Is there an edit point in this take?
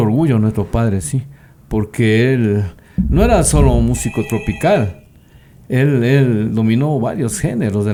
no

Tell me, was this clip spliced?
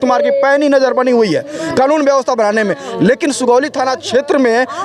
no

